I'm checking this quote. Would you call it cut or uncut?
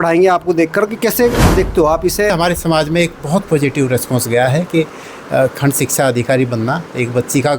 cut